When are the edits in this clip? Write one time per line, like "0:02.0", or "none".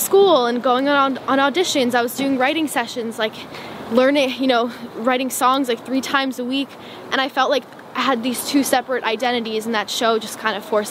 none